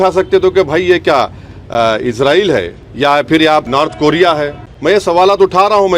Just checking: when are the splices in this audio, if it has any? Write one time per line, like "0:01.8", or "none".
0:02.8
0:03.7
0:04.6